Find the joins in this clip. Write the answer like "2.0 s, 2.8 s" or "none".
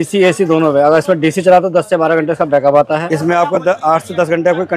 3.1 s